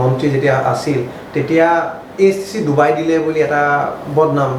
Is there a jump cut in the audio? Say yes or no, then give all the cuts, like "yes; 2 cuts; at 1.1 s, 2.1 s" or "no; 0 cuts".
no; 0 cuts